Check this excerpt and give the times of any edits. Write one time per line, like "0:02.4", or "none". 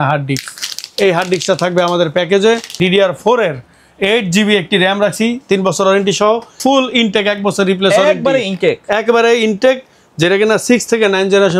0:02.7
0:06.6